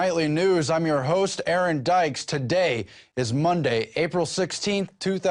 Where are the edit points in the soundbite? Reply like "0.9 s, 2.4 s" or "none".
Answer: none